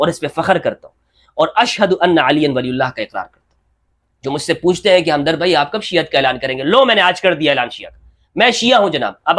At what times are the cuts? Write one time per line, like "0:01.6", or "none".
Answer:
none